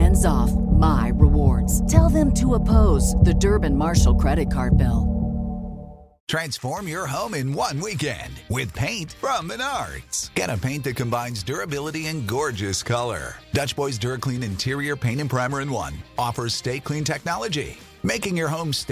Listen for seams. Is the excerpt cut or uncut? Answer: cut